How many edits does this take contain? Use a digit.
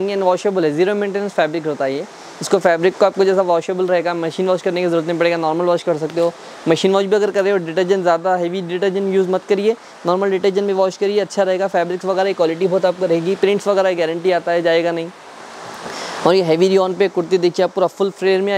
0